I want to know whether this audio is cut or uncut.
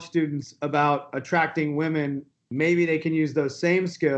cut